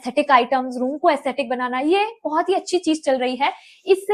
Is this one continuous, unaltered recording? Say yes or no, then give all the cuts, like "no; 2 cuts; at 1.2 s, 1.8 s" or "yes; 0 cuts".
yes; 0 cuts